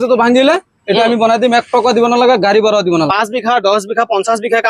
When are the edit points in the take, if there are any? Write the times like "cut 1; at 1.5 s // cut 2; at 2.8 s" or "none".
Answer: cut 1; at 3.1 s